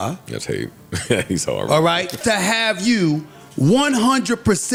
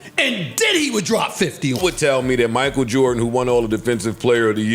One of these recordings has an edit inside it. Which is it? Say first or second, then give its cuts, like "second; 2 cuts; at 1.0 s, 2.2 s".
second; 1 cut; at 1.8 s